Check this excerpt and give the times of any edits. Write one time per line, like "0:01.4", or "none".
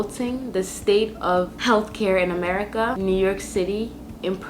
0:03.0

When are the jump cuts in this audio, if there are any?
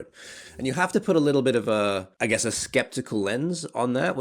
0:02.1

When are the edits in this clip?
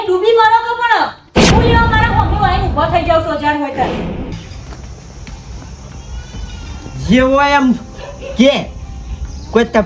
0:04.3

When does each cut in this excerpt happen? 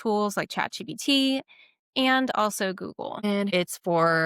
0:03.2

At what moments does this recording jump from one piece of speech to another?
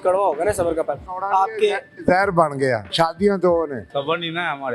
0:01.1
0:02.9
0:03.8

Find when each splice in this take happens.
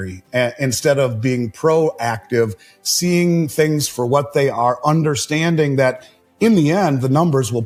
none

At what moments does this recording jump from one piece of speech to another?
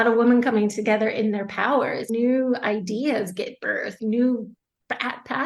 0:02.1
0:03.9

